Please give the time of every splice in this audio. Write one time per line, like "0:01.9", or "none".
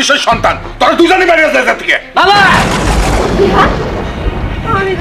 none